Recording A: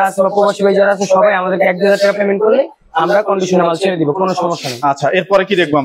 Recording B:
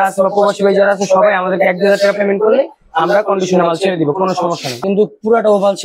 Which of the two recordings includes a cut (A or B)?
B